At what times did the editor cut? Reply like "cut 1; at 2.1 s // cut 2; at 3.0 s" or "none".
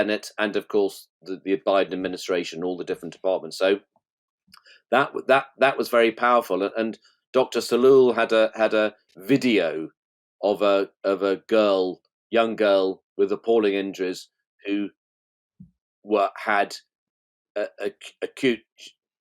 none

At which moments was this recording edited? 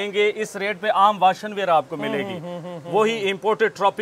none

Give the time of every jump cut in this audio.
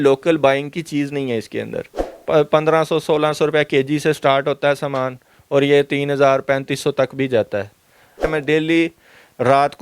cut 1; at 2.0 s // cut 2; at 8.3 s

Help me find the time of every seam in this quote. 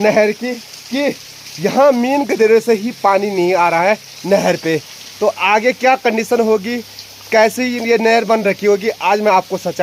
none

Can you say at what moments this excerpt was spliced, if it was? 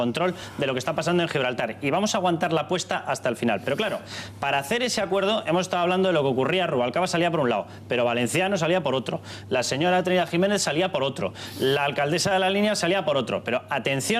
cut 1; at 10.3 s

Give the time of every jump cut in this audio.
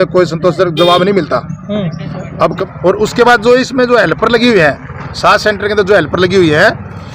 cut 1; at 2.6 s

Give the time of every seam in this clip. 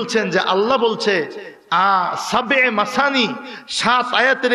none

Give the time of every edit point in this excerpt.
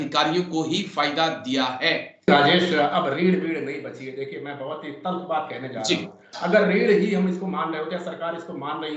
cut 1; at 2.3 s

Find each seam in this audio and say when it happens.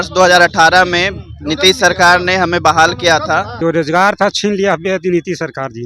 cut 1; at 3.5 s

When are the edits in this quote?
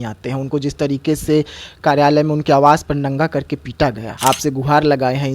cut 1; at 4.1 s

